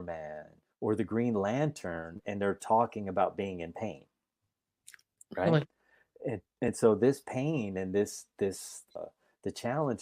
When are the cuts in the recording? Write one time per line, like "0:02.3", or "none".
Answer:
0:08.9